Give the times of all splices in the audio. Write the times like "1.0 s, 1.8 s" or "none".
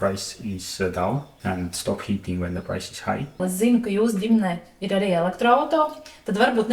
1.3 s, 3.3 s